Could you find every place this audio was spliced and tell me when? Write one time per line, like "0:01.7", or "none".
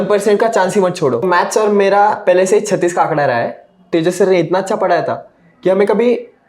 0:01.2
0:03.9